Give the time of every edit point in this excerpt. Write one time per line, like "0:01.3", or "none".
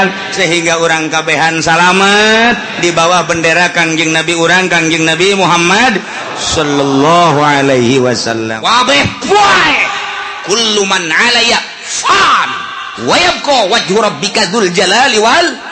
0:08.5